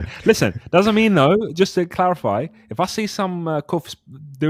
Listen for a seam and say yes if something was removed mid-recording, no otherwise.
no